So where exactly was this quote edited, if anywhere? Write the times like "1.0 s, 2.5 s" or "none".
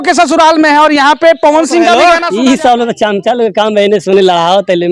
2.0 s